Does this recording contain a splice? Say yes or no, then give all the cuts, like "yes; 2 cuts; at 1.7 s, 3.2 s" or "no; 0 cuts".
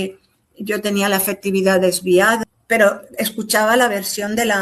yes; 1 cut; at 2.4 s